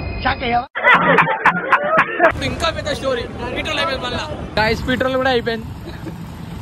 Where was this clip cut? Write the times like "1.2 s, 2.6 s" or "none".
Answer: 2.3 s, 4.6 s